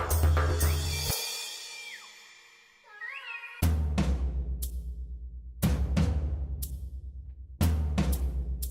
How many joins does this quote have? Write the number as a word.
zero